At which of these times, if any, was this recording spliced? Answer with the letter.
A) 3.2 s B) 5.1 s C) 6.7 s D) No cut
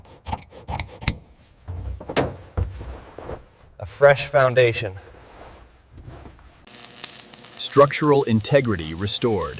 C